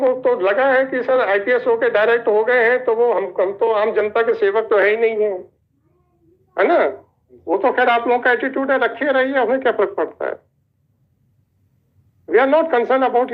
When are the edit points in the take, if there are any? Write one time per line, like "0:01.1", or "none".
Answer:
none